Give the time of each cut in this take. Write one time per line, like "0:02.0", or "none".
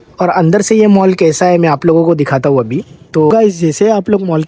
0:03.3